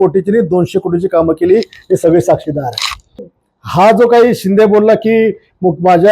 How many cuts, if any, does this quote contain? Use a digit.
1